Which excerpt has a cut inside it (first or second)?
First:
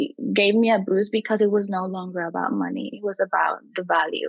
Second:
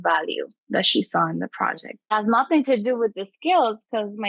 second